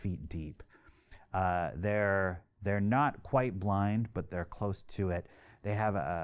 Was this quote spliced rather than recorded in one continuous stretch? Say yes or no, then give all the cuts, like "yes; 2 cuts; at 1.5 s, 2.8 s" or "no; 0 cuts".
no; 0 cuts